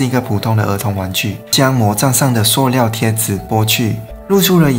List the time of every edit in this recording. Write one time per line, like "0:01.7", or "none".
0:01.5